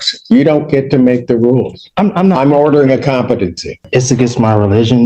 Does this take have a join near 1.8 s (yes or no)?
no